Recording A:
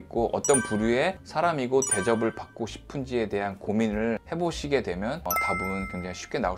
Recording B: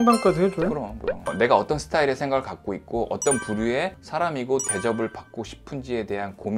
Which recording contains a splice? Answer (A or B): B